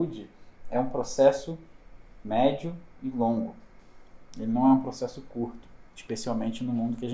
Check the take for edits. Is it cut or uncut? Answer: uncut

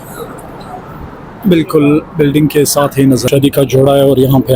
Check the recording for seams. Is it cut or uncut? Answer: cut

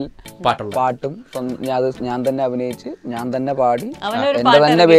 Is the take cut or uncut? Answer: uncut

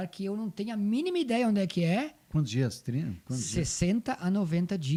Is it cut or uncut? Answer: uncut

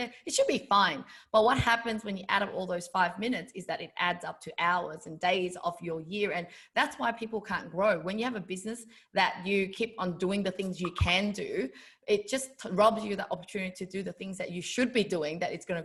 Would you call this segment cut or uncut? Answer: uncut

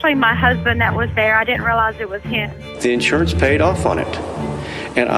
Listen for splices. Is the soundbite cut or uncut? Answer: cut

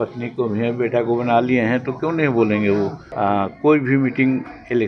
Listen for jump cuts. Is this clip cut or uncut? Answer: cut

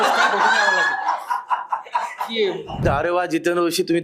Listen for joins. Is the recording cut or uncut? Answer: cut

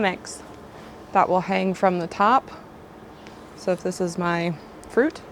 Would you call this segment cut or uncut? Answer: uncut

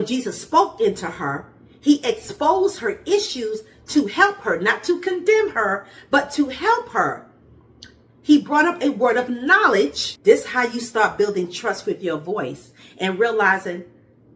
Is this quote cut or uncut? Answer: cut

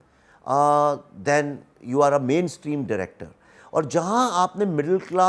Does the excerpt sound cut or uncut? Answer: uncut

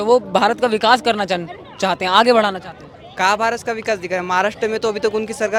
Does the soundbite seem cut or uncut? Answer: uncut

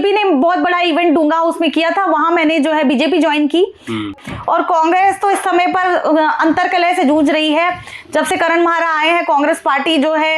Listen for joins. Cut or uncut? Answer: cut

